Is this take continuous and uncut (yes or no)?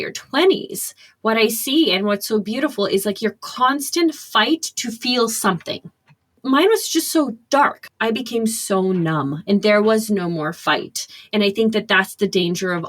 no